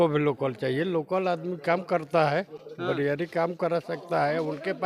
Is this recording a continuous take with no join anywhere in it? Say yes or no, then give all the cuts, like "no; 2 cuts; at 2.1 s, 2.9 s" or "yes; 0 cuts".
yes; 0 cuts